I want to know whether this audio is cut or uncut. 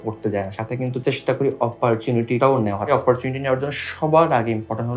uncut